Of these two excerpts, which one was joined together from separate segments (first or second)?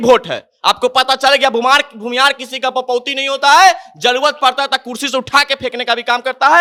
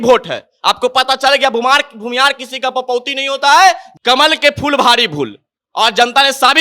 second